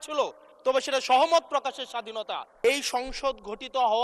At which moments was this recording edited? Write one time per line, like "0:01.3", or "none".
0:02.5

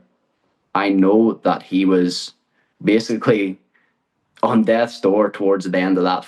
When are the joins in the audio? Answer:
none

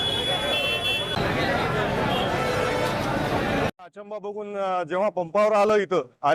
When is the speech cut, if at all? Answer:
0:03.7

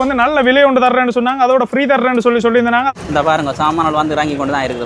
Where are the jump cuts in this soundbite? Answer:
0:02.9

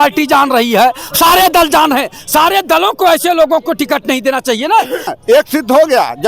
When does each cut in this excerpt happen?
0:05.1

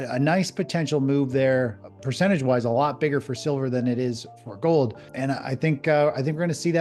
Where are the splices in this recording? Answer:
0:05.1

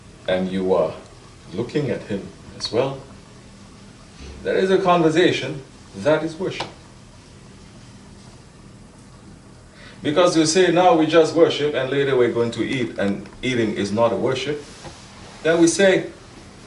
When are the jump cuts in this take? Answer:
0:14.8

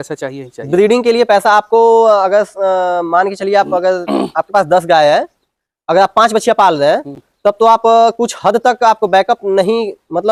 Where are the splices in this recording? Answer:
none

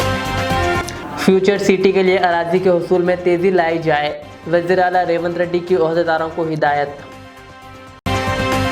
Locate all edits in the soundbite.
0:00.9

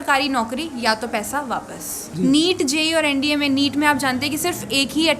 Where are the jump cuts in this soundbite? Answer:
0:02.0

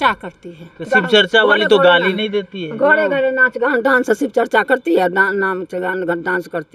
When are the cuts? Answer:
none

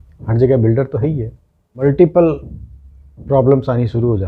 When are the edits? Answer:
0:01.1

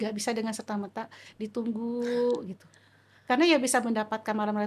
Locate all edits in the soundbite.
none

